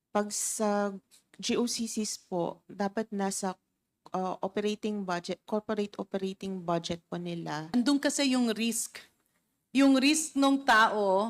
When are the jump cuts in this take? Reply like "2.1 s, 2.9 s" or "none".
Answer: 7.7 s